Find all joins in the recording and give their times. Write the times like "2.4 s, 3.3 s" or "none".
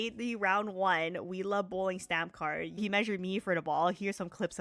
2.8 s